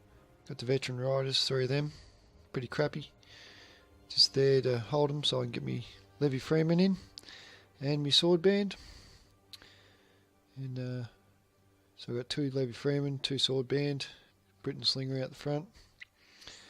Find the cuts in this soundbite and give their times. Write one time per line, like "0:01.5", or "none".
0:01.2